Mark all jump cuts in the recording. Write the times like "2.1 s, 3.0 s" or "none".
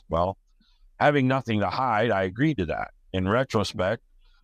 3.0 s